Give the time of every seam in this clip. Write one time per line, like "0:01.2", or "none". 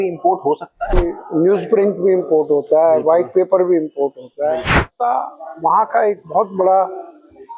0:01.0
0:04.9